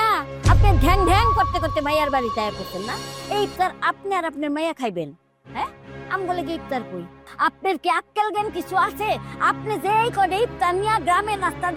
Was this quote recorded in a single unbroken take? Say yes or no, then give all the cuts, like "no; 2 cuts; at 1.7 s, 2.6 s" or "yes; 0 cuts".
yes; 0 cuts